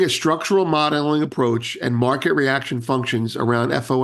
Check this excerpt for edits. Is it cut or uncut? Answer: uncut